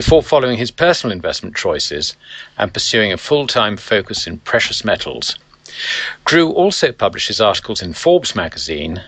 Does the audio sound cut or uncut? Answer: cut